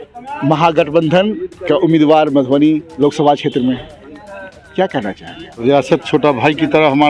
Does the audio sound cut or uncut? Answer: cut